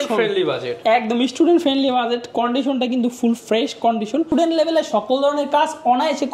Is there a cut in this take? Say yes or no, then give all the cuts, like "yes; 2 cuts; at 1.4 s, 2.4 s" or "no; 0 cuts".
yes; 1 cut; at 4.3 s